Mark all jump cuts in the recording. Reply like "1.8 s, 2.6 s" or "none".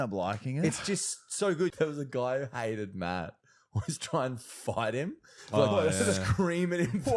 1.7 s